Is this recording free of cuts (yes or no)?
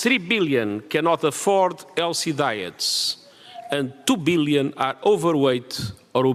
yes